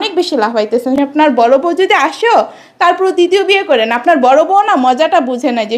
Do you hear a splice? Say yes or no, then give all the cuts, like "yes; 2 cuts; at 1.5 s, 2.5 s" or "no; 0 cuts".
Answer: yes; 1 cut; at 1.0 s